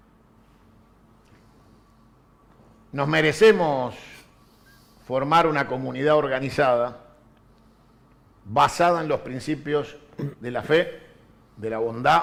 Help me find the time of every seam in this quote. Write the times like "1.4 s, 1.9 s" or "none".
none